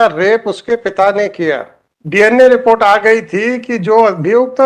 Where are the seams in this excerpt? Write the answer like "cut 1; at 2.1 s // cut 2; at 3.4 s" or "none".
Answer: cut 1; at 1.8 s